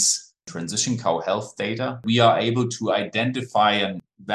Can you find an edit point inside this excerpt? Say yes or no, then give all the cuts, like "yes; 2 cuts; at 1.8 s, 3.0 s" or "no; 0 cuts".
yes; 1 cut; at 2.0 s